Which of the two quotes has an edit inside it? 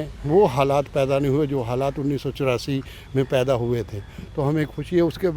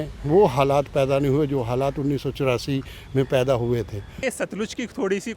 second; 1 cut; at 4.2 s

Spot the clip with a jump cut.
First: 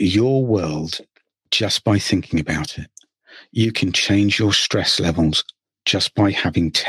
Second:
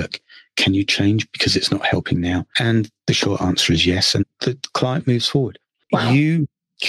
second; 3 cuts; at 2.5 s, 4.2 s, 5.7 s

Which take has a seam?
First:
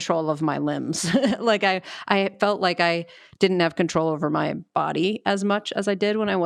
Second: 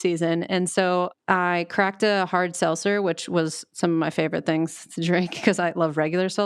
second; 1 cut; at 1.2 s

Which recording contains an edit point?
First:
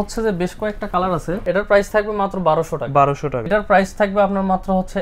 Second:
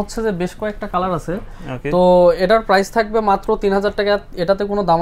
first; 2 cuts; at 1.4 s, 3.5 s

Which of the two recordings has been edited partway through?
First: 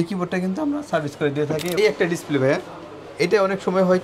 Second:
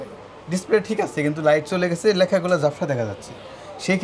first; 1 cut; at 1.7 s

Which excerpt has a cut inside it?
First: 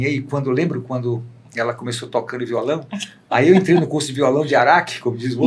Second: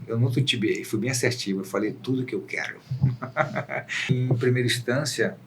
second; 1 cut; at 4.1 s

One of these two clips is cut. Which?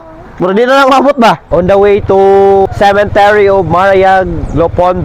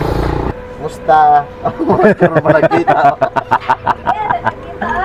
first; 1 cut; at 1.4 s

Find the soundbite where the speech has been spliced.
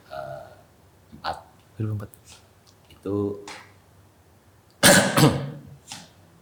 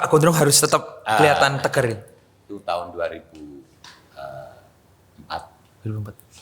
second; 1 cut; at 2.5 s

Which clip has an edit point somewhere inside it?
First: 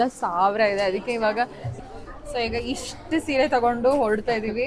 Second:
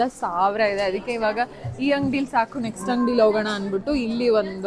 first; 1 cut; at 1.6 s

